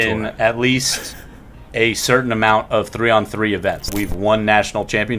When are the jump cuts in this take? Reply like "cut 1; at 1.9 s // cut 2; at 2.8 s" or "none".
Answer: cut 1; at 3.9 s